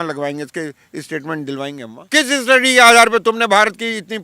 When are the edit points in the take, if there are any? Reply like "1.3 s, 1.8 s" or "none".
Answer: 1.9 s